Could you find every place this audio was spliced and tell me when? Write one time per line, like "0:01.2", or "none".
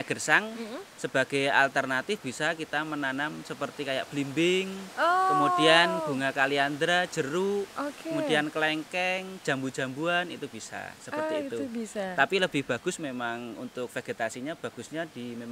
none